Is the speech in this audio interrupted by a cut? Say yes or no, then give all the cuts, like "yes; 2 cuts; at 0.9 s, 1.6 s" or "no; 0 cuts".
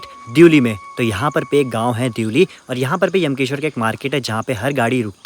no; 0 cuts